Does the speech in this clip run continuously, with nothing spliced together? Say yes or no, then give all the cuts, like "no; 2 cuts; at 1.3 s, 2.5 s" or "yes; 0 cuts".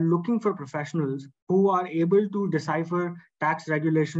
no; 1 cut; at 1.3 s